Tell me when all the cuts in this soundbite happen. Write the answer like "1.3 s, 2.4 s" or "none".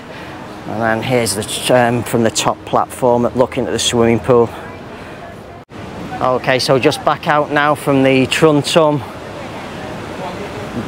none